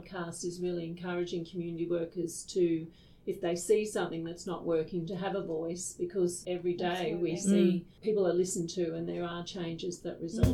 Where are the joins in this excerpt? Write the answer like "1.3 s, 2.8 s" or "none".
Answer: 6.4 s, 7.9 s

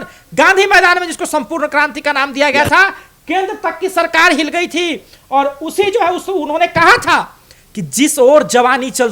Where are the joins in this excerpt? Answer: none

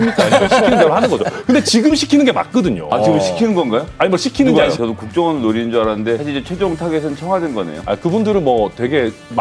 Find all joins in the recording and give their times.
4.8 s, 6.2 s

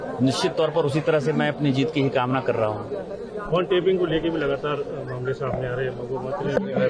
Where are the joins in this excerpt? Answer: none

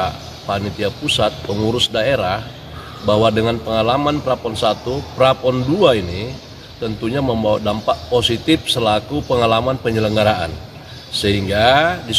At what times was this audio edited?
none

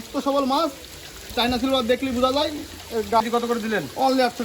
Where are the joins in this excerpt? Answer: 3.2 s

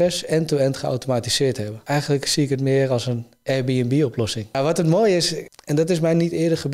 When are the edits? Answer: 1.7 s, 4.5 s, 5.4 s

